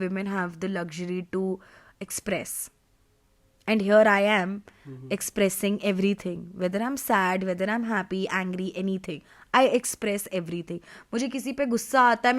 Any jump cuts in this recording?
no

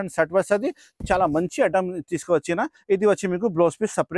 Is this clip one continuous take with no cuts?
no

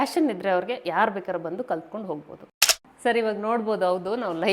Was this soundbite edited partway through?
yes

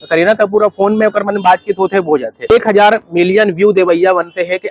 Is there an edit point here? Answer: yes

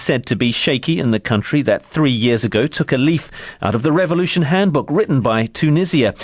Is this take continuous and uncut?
no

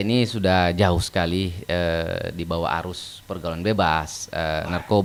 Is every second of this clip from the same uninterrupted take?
yes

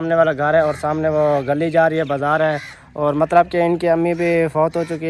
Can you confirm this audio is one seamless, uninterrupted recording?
yes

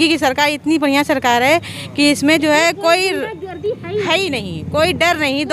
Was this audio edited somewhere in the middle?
no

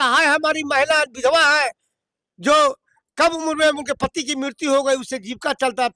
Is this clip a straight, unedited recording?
yes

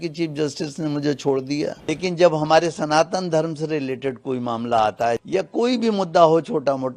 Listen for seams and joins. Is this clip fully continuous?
no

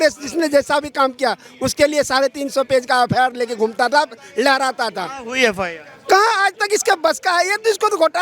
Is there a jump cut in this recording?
no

